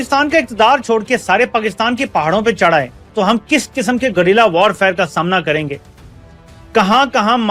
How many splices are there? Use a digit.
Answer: 1